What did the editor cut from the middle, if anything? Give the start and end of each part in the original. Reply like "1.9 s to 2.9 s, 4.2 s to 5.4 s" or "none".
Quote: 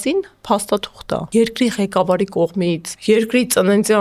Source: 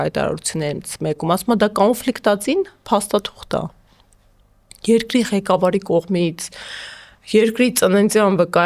3.7 s to 4.8 s, 6.4 s to 7.2 s